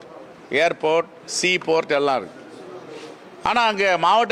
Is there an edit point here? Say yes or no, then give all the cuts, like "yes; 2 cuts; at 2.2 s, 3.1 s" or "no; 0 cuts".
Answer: no; 0 cuts